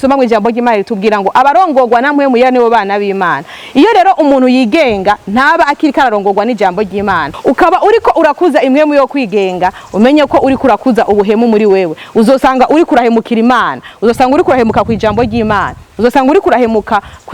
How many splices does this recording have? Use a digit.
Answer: 1